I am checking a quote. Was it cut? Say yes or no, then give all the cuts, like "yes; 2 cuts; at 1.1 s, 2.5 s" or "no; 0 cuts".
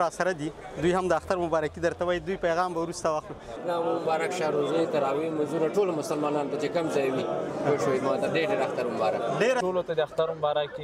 yes; 2 cuts; at 3.6 s, 9.6 s